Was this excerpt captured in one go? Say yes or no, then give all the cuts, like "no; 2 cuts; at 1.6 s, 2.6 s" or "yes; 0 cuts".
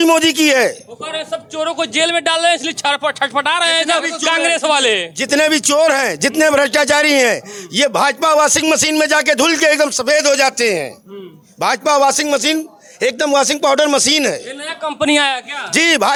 yes; 0 cuts